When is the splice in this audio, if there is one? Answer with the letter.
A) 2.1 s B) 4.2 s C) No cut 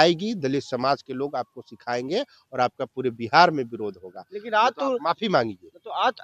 C